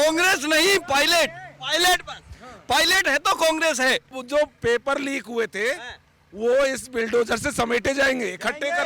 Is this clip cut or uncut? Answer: cut